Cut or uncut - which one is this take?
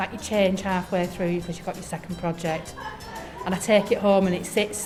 uncut